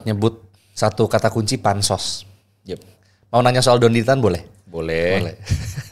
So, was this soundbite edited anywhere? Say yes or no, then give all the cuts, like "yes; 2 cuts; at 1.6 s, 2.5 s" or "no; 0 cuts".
no; 0 cuts